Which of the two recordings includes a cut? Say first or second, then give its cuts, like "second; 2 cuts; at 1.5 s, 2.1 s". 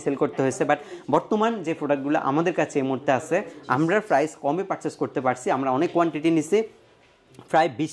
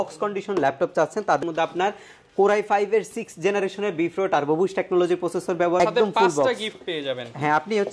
second; 2 cuts; at 1.4 s, 5.8 s